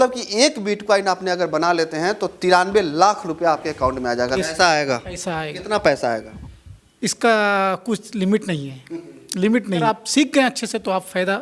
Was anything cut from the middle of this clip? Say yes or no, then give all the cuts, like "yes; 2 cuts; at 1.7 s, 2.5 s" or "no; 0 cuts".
yes; 2 cuts; at 4.4 s, 9.8 s